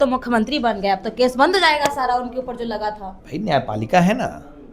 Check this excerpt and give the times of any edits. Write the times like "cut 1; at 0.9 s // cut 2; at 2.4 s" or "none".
cut 1; at 3.1 s